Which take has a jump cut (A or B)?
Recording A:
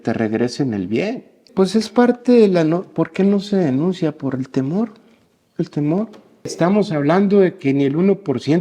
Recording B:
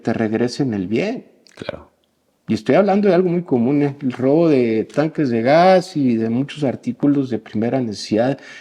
A